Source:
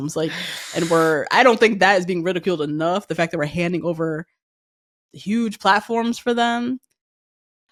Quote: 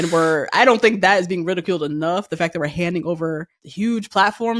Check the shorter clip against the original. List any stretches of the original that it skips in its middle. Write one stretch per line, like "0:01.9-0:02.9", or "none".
0:04.4-0:05.1